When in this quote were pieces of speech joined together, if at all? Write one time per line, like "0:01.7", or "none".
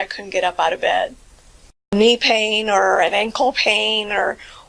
0:01.9